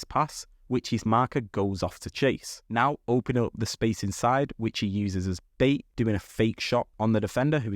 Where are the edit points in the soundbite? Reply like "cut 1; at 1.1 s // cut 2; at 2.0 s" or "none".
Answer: cut 1; at 2.5 s // cut 2; at 5.9 s